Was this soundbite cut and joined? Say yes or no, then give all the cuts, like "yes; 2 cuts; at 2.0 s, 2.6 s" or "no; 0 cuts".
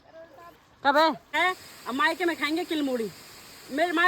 yes; 1 cut; at 1.3 s